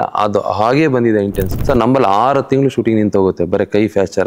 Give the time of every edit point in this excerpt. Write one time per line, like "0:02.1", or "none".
0:01.5